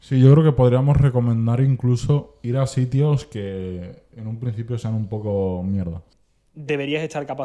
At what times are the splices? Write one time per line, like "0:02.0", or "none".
0:06.1